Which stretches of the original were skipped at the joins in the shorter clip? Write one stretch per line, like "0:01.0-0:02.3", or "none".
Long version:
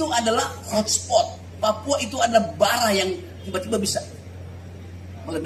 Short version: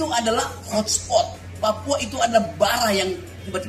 none